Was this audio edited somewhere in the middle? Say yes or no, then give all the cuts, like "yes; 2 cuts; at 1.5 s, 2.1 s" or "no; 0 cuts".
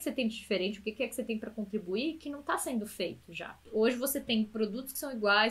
yes; 1 cut; at 3.6 s